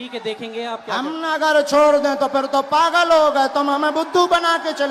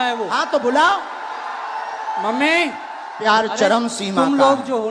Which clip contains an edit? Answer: second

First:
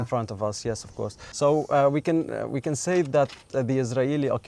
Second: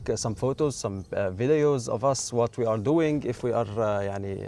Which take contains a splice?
first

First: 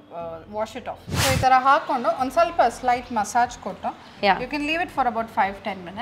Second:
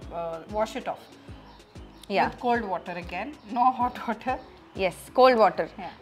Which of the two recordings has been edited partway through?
first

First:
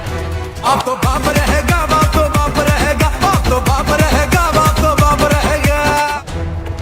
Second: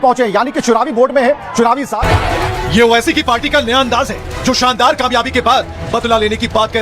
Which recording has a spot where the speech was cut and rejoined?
second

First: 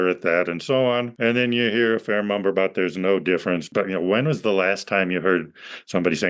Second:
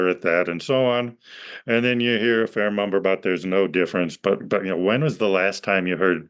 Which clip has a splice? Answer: first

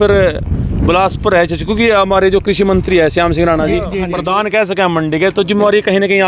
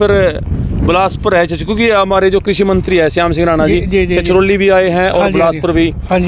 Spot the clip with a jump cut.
first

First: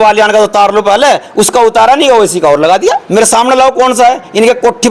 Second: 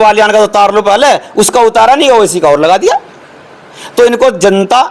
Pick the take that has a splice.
first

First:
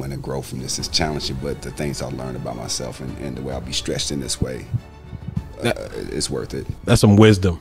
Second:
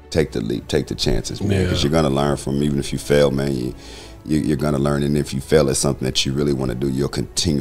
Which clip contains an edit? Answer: first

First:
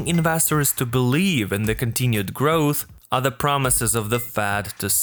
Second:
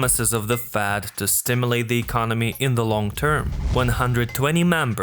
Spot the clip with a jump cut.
second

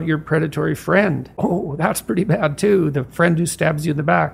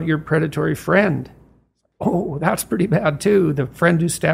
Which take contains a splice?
first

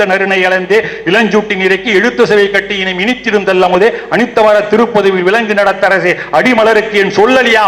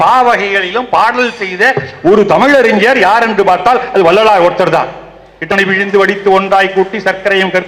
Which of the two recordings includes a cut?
second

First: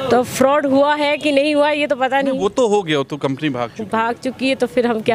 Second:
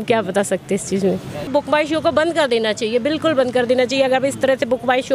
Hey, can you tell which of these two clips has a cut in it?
second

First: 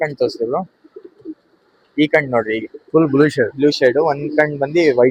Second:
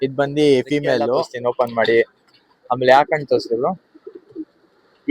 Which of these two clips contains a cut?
second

